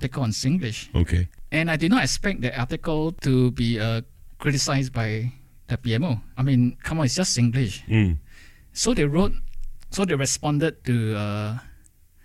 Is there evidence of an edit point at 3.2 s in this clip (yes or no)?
yes